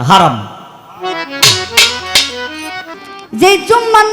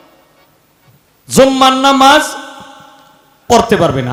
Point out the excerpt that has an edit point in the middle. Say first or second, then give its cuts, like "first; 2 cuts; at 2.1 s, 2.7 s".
first; 1 cut; at 2.9 s